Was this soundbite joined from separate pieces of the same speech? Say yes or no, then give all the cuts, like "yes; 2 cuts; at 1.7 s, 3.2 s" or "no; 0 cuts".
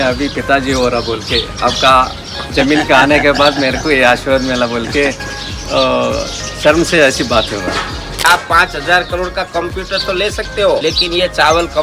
yes; 2 cuts; at 8.2 s, 10.8 s